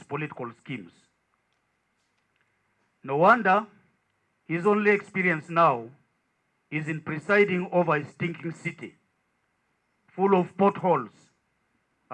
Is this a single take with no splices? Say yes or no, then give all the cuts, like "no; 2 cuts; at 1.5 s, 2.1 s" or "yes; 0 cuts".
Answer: yes; 0 cuts